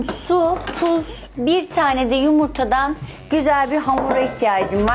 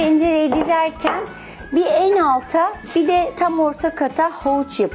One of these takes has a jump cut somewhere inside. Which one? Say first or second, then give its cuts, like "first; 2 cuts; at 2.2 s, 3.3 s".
second; 1 cut; at 2.9 s